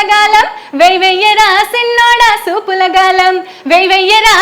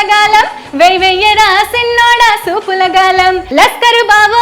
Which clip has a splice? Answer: second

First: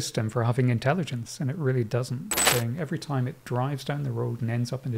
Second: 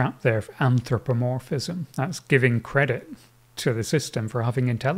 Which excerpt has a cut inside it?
first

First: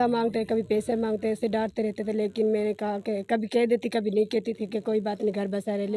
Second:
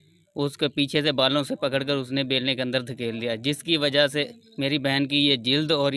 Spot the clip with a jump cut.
first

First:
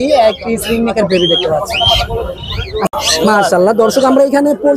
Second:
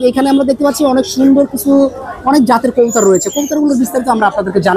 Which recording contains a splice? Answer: first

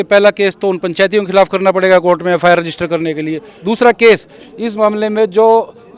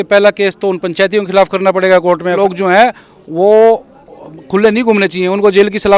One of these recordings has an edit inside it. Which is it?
second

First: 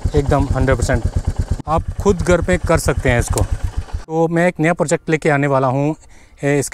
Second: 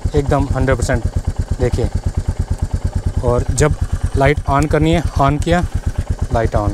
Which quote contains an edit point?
first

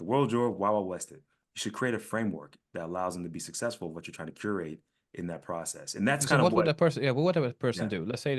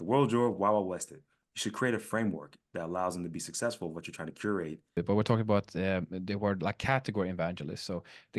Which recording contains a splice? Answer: second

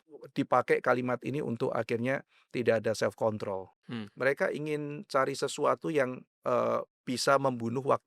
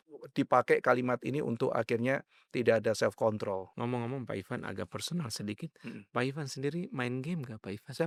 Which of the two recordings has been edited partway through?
first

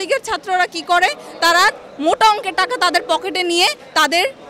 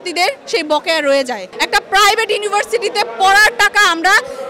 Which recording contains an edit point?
second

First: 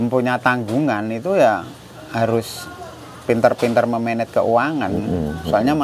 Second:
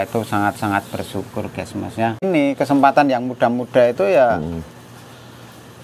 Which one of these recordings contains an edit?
second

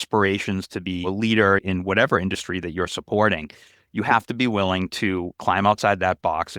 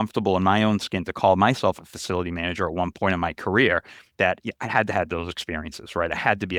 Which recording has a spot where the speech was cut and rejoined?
first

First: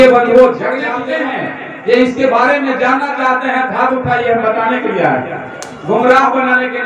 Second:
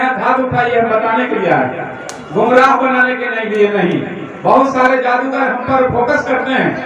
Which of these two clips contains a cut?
first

